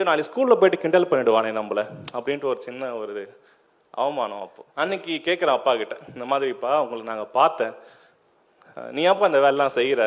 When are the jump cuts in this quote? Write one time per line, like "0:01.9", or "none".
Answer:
0:04.6